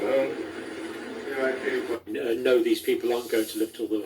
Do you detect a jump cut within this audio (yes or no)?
yes